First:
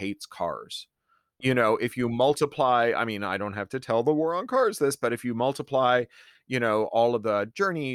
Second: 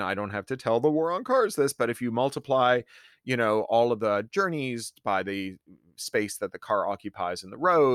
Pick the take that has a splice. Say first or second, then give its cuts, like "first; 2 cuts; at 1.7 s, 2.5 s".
first; 1 cut; at 1.2 s